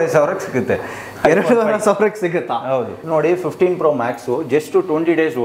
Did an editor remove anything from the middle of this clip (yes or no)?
yes